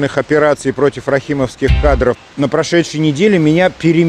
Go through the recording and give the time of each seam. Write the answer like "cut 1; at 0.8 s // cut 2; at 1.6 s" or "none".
cut 1; at 2.2 s

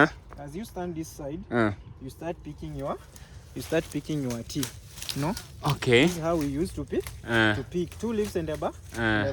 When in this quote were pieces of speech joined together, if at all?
none

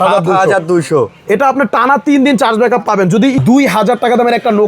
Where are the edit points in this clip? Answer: cut 1; at 3.4 s

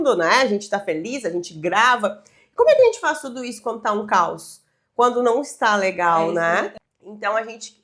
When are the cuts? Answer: cut 1; at 6.8 s

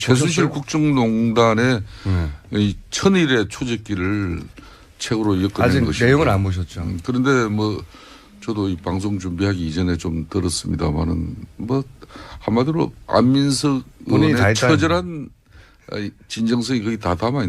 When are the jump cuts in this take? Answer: cut 1; at 6.9 s

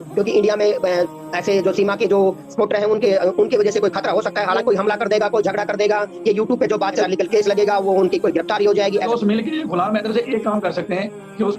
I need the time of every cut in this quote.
cut 1; at 4.6 s // cut 2; at 7.0 s // cut 3; at 9.1 s

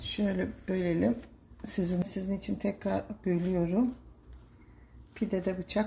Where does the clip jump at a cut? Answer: cut 1; at 2.0 s

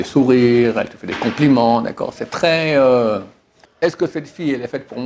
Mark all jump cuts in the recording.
cut 1; at 3.6 s

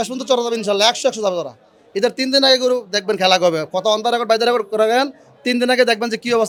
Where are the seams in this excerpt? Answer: none

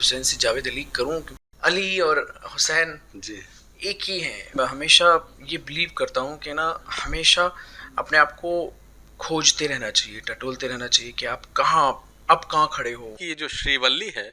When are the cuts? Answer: cut 1; at 1.4 s // cut 2; at 4.5 s // cut 3; at 13.2 s

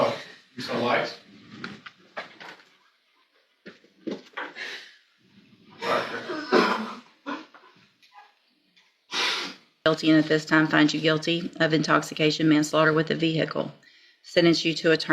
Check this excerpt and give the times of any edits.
cut 1; at 9.9 s

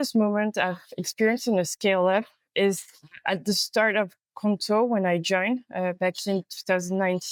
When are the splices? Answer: none

